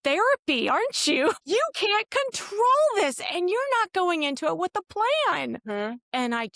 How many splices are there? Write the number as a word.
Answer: two